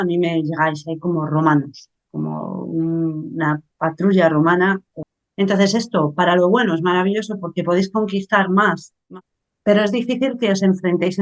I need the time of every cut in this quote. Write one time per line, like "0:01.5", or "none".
0:04.9
0:09.1